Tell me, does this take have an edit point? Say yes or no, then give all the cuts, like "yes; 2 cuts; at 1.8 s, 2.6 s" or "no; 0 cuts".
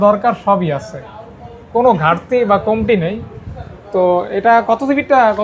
no; 0 cuts